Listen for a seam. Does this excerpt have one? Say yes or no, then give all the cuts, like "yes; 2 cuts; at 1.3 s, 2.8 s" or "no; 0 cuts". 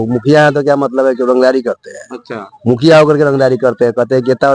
no; 0 cuts